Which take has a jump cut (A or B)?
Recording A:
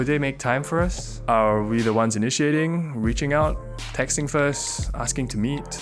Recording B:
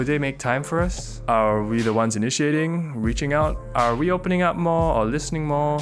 B